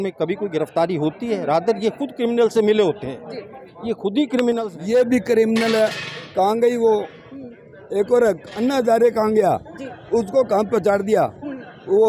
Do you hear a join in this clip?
yes; 1 cut; at 4.7 s

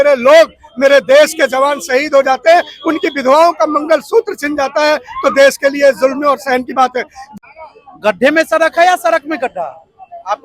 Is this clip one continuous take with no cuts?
no; 1 cut; at 7.2 s

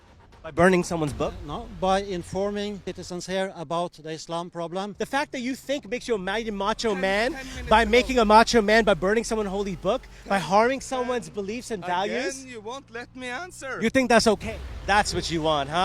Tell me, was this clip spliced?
yes; 3 cuts; at 2.9 s, 5.0 s, 14.7 s

